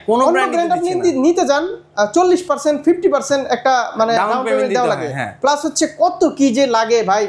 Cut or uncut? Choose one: uncut